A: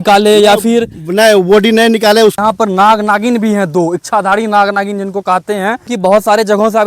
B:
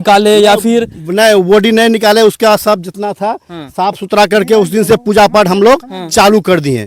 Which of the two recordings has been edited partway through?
A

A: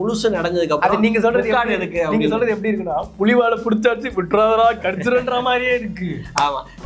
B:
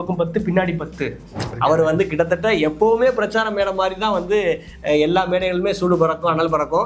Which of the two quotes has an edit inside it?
B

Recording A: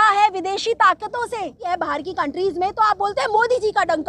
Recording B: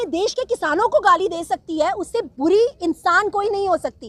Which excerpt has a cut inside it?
A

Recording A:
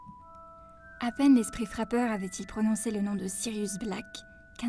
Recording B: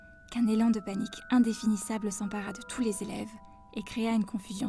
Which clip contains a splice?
A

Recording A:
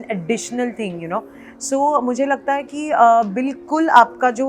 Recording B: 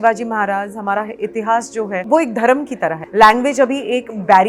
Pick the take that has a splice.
B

